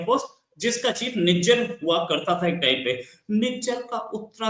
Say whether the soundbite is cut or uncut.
uncut